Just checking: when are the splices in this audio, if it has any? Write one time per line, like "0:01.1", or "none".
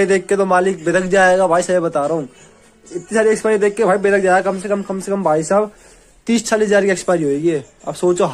none

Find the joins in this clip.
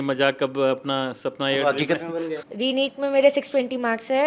0:02.3

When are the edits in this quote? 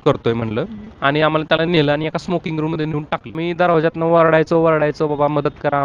0:03.4

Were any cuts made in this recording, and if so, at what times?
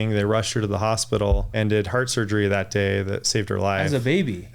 0:01.5

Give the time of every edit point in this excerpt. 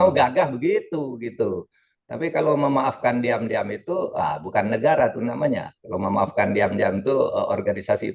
none

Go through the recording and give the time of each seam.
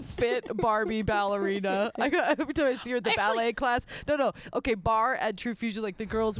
none

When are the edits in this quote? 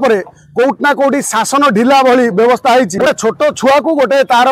0:03.1

